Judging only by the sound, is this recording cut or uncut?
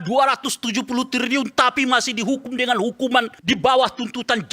cut